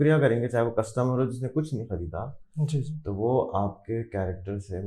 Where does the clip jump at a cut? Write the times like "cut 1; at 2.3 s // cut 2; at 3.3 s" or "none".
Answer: none